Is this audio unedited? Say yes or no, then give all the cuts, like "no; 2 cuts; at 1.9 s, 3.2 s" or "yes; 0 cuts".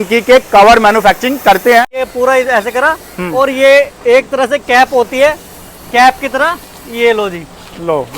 no; 1 cut; at 2.0 s